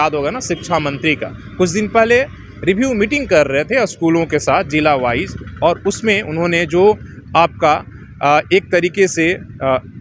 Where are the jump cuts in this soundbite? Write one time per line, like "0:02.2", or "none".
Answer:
none